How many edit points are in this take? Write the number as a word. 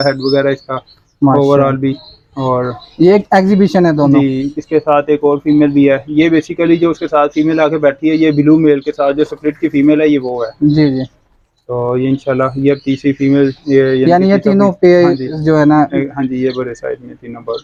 zero